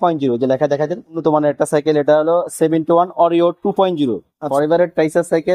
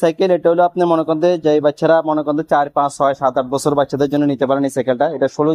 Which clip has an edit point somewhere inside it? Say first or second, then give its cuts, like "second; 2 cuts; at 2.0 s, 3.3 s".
first; 2 cuts; at 1.2 s, 4.5 s